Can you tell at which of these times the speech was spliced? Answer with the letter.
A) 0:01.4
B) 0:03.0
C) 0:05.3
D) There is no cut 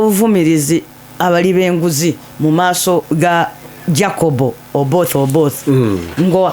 B